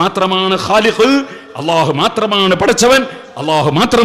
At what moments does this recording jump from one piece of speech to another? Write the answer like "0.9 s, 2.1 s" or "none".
none